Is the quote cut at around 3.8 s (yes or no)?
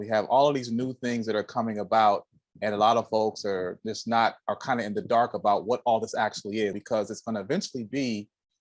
no